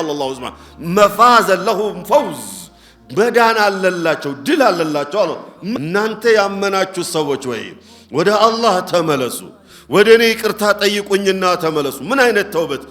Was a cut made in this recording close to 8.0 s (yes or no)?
no